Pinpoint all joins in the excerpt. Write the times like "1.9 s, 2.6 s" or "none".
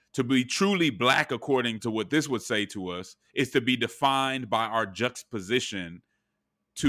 1.8 s